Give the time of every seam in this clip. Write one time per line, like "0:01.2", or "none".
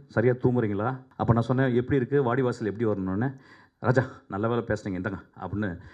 0:01.0

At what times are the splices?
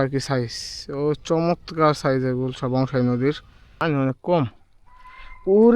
0:03.8

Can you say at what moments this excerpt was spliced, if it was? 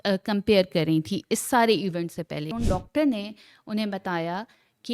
0:02.5

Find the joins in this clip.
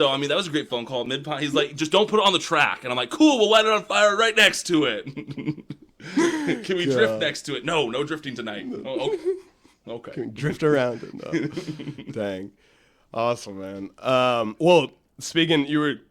none

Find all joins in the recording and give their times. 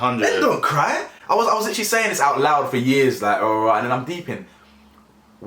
none

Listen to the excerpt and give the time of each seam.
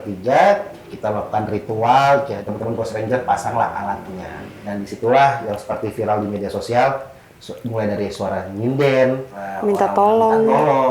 0:02.4
0:04.5
0:09.5

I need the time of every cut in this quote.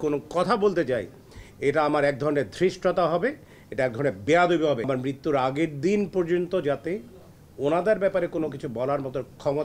0:04.9

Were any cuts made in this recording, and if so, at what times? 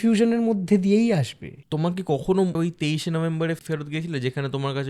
0:01.6
0:02.6
0:03.6

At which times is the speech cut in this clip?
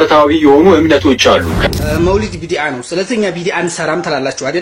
0:01.5

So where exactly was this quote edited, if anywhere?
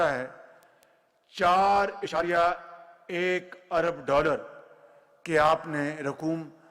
0:02.2

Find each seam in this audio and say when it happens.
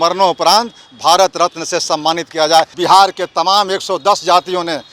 0:02.7

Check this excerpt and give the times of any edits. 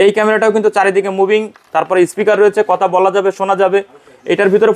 none

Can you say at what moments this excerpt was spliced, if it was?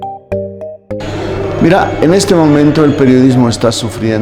0:01.0

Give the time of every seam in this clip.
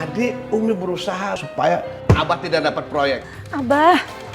0:03.3

